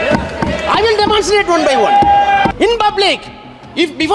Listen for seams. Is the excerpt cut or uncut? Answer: cut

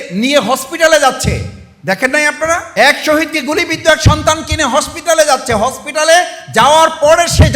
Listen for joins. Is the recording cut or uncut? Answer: cut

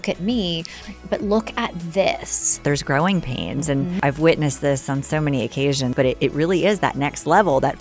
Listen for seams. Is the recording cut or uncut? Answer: cut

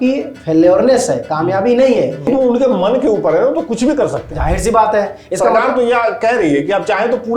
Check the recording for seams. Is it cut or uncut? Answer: cut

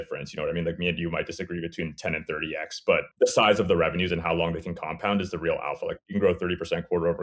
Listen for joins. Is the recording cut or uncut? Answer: cut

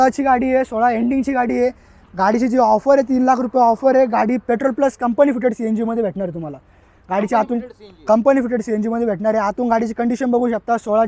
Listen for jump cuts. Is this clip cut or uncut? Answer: uncut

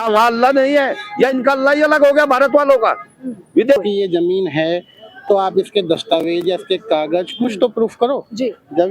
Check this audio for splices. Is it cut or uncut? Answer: cut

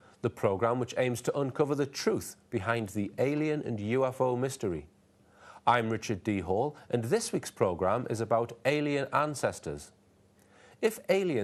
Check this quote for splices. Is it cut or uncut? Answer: uncut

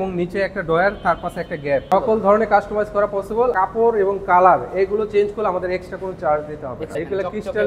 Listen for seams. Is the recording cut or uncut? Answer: cut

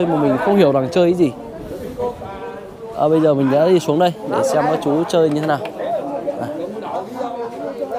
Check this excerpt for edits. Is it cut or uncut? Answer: uncut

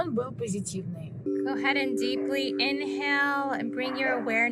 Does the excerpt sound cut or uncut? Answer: cut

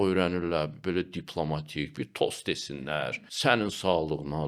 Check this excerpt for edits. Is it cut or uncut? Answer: cut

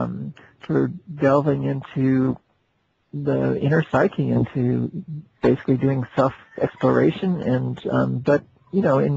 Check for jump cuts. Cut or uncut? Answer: uncut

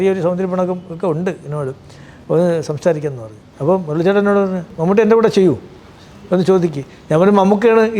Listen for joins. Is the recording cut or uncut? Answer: cut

